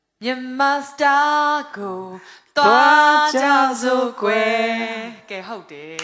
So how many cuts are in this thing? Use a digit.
0